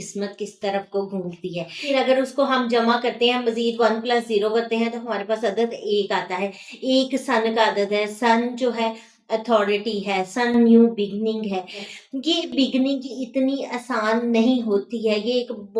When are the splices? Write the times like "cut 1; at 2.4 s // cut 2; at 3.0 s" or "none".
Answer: cut 1; at 1.9 s // cut 2; at 11.8 s